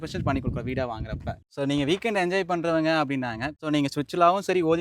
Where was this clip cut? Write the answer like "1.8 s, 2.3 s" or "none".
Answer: 1.3 s, 3.5 s